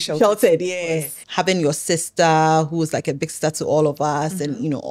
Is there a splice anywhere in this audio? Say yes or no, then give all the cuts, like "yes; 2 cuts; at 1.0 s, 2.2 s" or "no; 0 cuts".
yes; 1 cut; at 1.2 s